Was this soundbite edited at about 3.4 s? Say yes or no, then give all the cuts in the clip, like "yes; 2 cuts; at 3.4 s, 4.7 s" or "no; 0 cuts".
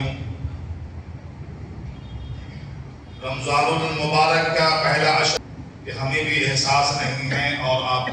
no; 1 cut; at 5.3 s